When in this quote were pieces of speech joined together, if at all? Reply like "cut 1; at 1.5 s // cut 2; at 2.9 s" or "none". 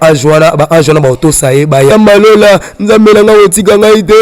cut 1; at 1.9 s